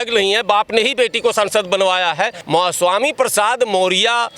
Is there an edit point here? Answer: yes; 1 cut; at 2.4 s

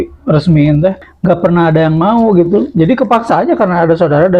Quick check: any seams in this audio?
yes; 1 cut; at 1.1 s

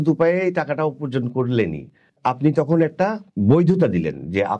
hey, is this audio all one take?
no; 2 cuts; at 2.2 s, 3.3 s

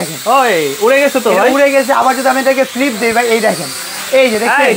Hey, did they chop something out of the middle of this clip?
no; 0 cuts

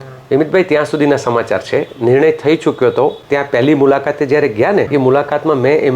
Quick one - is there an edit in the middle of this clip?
yes; 2 cuts; at 3.2 s, 4.9 s

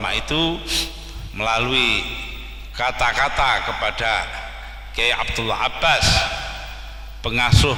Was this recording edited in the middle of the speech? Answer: no; 0 cuts

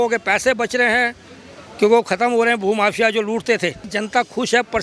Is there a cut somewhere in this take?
yes; 1 cut; at 3.9 s

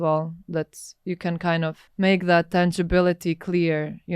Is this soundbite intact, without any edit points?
no; 1 cut; at 1.8 s

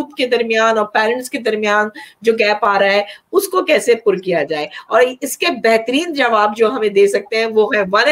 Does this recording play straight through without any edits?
yes; 0 cuts

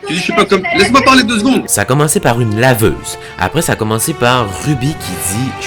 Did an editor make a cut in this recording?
yes; 1 cut; at 1.7 s

